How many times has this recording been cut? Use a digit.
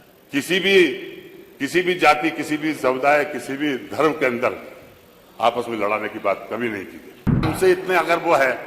1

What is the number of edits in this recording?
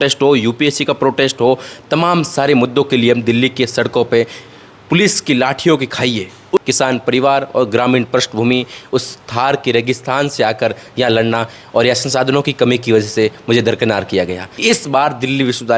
2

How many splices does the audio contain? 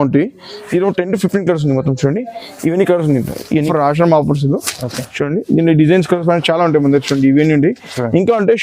1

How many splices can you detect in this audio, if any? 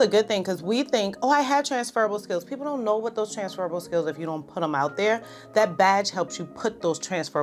0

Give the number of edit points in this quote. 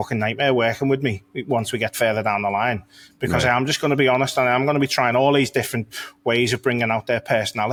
0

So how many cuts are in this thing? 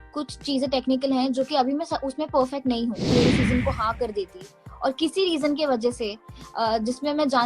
1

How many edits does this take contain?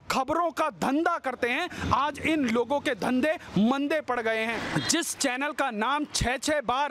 1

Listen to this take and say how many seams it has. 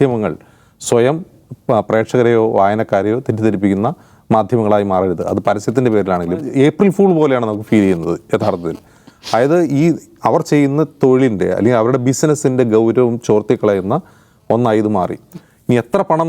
1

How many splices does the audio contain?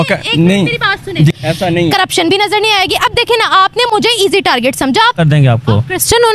2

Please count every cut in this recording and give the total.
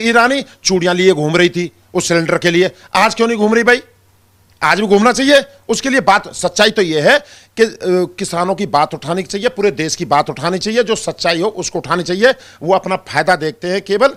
0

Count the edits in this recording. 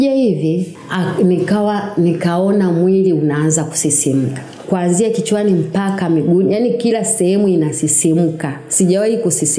1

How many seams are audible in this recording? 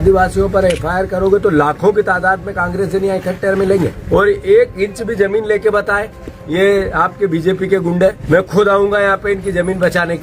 2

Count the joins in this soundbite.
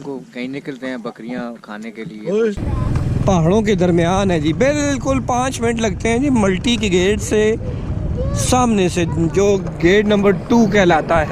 1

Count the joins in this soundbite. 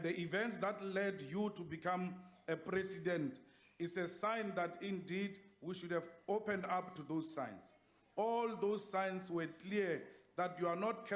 1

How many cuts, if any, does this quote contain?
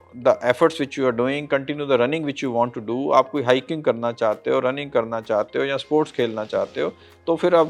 0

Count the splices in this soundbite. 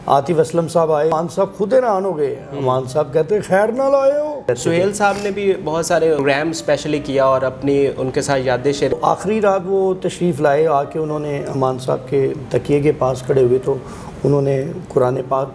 4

